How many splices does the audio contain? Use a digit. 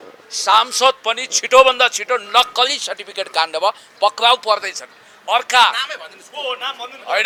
0